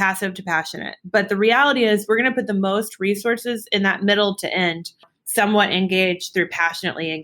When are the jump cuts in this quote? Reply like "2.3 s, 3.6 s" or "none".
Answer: 5.2 s